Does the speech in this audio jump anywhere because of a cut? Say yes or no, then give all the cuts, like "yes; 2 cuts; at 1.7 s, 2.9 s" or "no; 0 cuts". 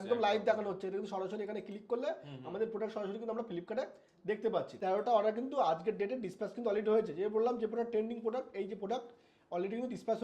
yes; 1 cut; at 4.7 s